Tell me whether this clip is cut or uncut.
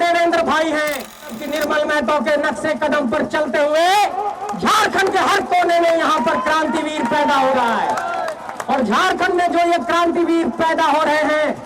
cut